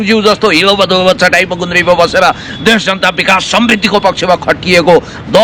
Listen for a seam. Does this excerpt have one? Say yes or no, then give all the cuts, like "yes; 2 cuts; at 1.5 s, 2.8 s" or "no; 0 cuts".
no; 0 cuts